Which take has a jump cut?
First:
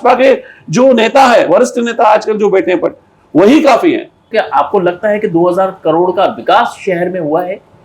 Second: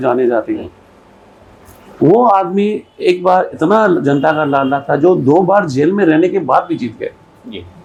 first; 1 cut; at 4.2 s

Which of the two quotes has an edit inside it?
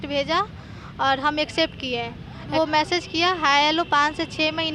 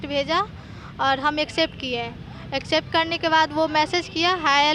first; 1 cut; at 2.5 s

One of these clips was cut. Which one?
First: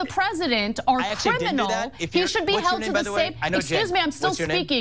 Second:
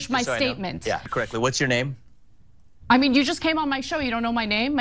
second; 1 cut; at 1.1 s

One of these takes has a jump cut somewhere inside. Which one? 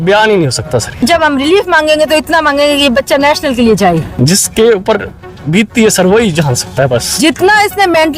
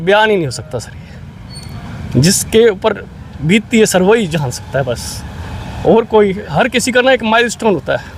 first; 3 cuts; at 0.9 s, 4.1 s, 7.2 s

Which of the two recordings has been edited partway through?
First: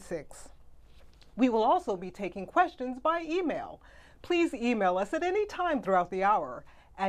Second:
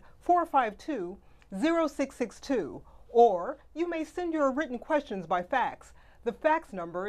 second; 1 cut; at 4.0 s

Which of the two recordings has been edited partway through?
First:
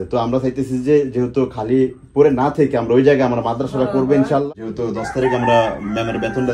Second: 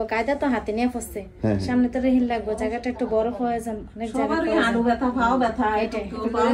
first; 1 cut; at 4.5 s

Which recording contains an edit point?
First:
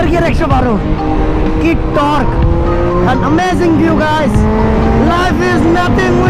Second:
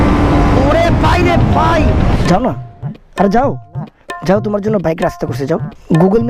second; 1 cut; at 2.1 s

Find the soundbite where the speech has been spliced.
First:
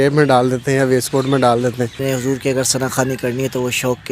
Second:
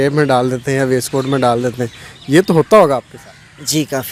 first; 1 cut; at 2.0 s

